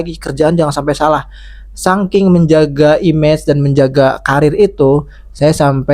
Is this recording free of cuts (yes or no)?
yes